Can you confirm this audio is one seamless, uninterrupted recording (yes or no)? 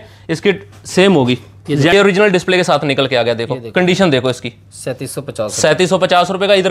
no